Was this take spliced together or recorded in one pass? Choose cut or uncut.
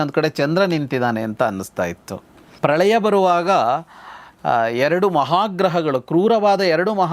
cut